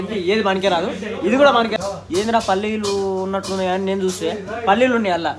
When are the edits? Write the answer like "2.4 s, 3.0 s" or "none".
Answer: 1.7 s